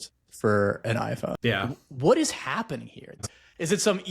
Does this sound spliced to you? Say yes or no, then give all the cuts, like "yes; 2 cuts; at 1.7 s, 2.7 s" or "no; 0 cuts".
yes; 2 cuts; at 1.8 s, 3.2 s